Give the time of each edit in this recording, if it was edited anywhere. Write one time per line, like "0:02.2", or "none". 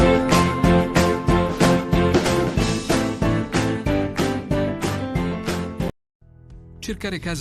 0:05.9